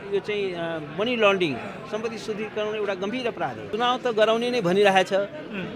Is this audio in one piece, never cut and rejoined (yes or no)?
no